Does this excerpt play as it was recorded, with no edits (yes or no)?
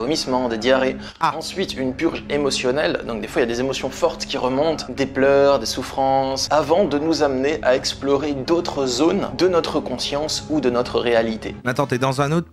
no